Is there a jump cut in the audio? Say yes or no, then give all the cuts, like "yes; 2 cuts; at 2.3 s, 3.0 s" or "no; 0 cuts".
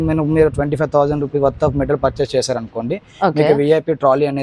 no; 0 cuts